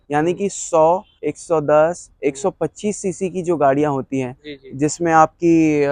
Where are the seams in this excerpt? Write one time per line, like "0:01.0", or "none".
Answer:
none